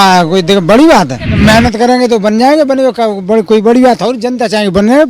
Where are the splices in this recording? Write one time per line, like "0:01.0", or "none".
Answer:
0:01.2

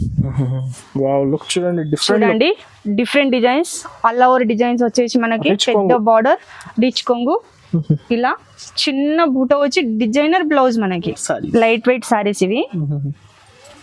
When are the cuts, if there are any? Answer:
0:11.3

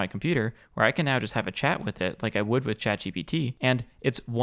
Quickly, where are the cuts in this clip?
none

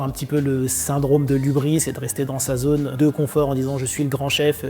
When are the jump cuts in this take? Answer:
0:02.9

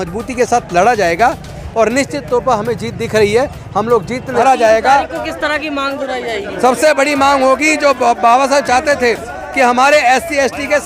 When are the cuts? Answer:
0:04.4

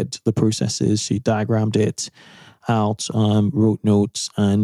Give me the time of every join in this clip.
none

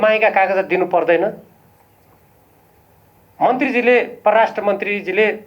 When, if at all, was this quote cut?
none

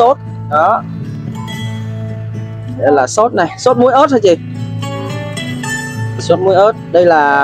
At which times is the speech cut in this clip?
0:01.4
0:02.7

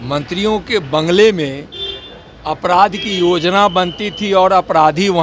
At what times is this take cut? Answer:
none

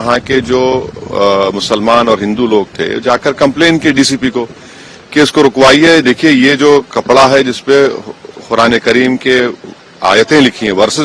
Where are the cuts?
none

